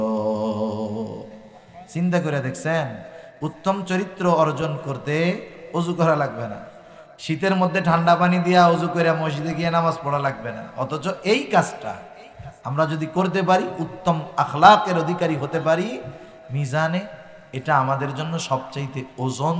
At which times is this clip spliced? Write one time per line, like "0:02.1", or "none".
none